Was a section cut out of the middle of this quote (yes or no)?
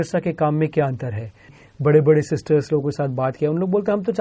yes